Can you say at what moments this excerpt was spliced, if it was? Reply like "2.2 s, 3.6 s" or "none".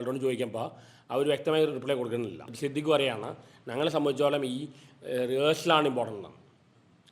2.5 s